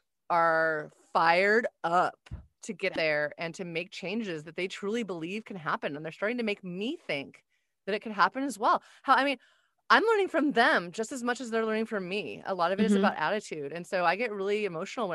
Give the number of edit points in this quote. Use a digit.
1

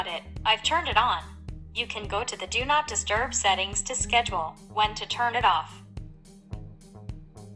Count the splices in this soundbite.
1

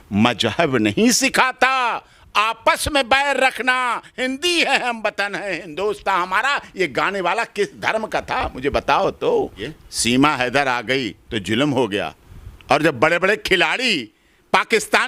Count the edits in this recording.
1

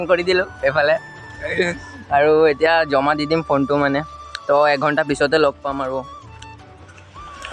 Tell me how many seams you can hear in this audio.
0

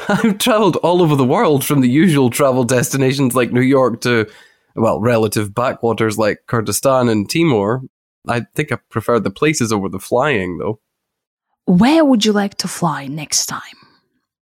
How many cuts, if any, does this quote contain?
1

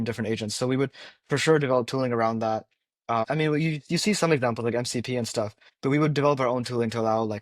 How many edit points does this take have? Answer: 2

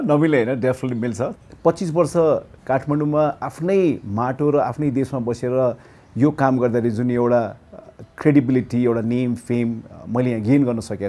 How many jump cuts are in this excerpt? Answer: 1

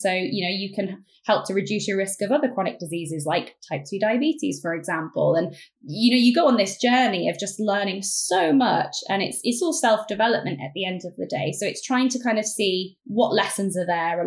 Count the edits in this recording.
1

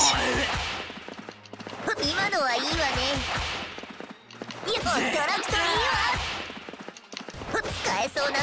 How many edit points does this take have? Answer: 0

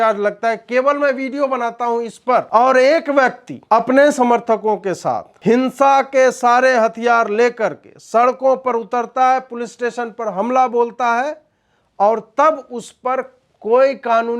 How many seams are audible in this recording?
3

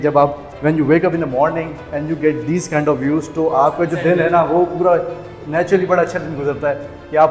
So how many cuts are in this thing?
0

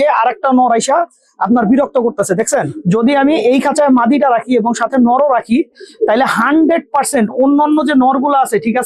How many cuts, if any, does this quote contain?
1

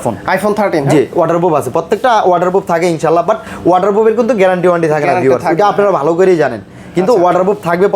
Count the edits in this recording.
0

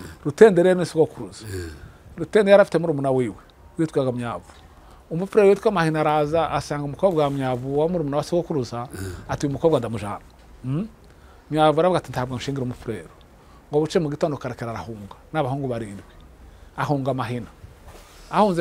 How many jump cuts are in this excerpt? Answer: 0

